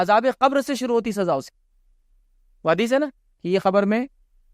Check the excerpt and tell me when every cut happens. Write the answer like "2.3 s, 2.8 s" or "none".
none